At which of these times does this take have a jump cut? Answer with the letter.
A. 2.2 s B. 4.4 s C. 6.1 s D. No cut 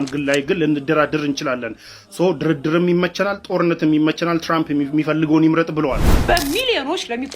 C